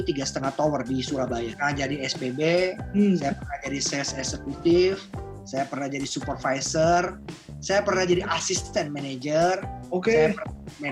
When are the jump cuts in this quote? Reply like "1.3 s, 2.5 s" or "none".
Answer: 1.5 s

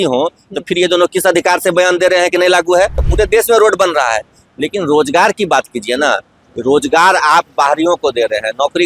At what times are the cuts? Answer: 3.0 s

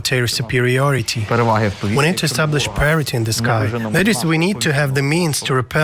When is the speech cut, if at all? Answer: none

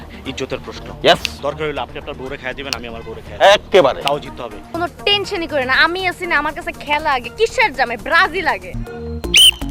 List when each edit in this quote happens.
4.6 s, 8.7 s

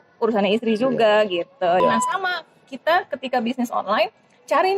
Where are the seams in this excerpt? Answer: 1.8 s

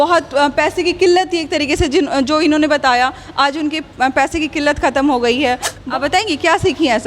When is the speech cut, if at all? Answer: 5.7 s

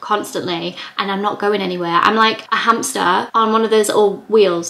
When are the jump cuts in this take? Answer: 2.5 s

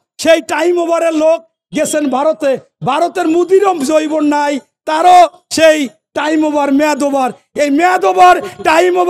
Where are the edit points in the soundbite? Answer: none

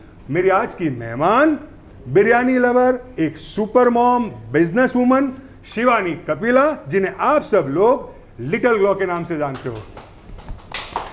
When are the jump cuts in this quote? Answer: none

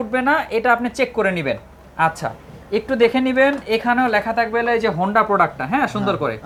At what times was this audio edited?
none

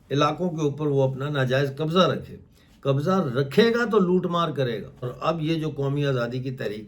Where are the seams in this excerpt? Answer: 5.1 s

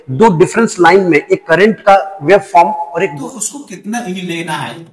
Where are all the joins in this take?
3.2 s

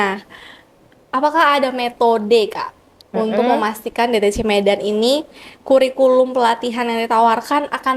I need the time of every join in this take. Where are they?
none

